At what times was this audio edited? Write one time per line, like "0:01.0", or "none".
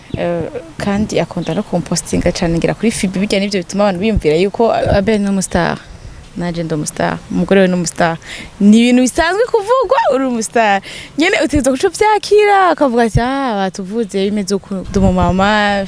0:04.8
0:14.8